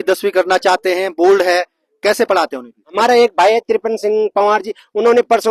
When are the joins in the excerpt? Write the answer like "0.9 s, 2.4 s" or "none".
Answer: 2.9 s

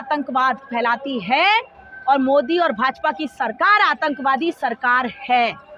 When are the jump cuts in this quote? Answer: none

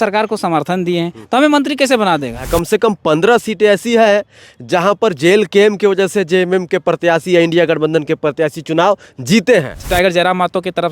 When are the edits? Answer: 2.4 s, 9.8 s

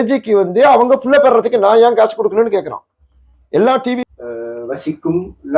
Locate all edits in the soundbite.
4.0 s

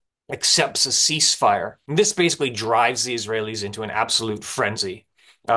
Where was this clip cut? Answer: 1.8 s

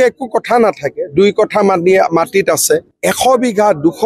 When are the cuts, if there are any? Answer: 2.9 s

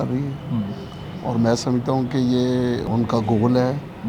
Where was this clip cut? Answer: 2.9 s

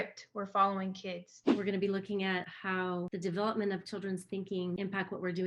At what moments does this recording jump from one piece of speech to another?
1.4 s

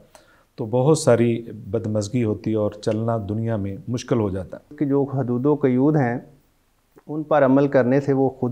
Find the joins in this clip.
4.7 s

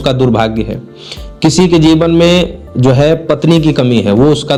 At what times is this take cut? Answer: none

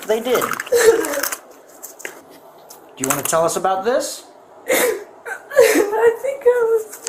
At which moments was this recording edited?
2.2 s

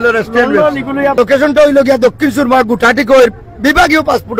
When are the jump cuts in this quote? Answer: 1.1 s

